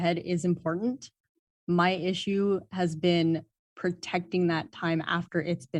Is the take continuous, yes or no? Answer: yes